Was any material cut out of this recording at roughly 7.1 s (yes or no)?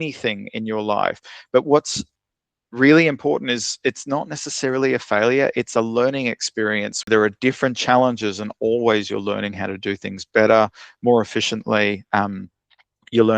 yes